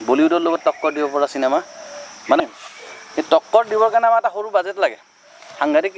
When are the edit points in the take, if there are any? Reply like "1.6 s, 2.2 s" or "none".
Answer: 2.4 s